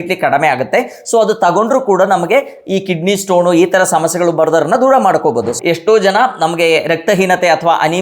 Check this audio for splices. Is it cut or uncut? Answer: cut